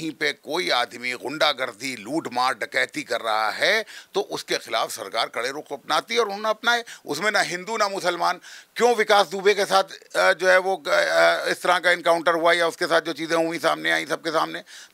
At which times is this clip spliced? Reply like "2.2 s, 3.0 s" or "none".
none